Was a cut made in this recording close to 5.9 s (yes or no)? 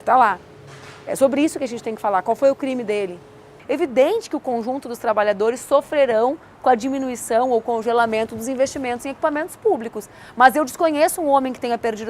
no